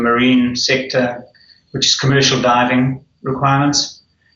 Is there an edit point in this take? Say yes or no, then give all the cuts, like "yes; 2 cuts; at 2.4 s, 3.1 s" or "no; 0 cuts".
yes; 1 cut; at 3.1 s